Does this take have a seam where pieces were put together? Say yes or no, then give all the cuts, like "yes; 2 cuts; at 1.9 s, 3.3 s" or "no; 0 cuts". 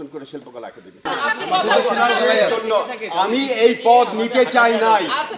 yes; 1 cut; at 1.1 s